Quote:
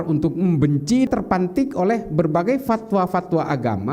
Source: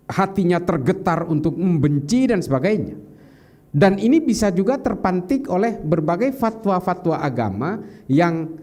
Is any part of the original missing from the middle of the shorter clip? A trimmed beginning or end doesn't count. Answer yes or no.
yes